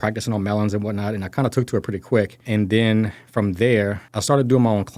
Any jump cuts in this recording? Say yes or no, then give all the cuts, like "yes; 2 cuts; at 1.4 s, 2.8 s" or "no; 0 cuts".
yes; 2 cuts; at 2.4 s, 4.1 s